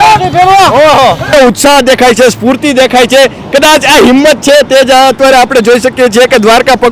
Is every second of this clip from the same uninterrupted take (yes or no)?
no